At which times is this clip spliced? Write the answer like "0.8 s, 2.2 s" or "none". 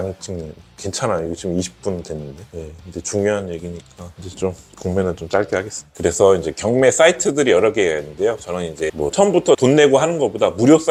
none